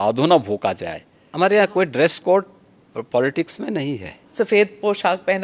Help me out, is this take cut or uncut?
cut